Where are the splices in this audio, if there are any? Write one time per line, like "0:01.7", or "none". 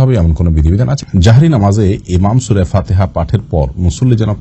0:01.0

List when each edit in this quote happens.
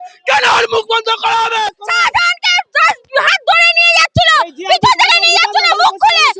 0:01.7

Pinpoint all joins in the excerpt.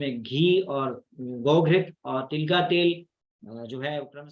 none

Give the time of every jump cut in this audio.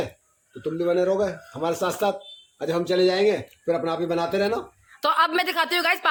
none

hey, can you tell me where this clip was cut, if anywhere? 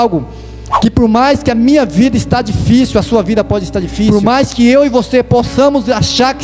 0:04.1

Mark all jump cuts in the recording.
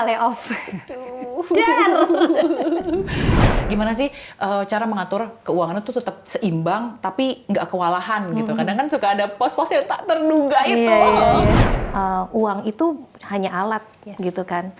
0:03.4
0:11.6

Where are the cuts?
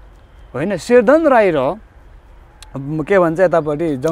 none

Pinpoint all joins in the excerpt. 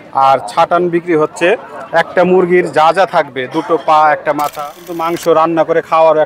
0:05.0

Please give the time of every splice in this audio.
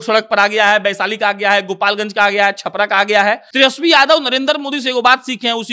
0:03.5

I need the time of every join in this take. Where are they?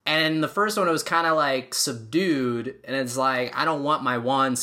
none

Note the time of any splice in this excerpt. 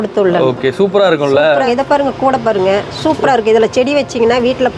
0:01.6

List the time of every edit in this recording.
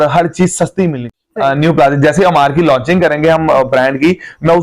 0:01.1

